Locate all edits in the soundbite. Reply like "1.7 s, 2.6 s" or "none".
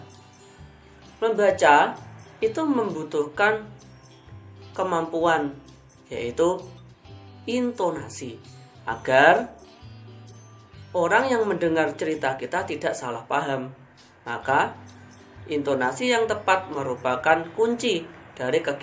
none